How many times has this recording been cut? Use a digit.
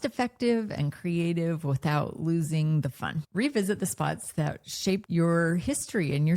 2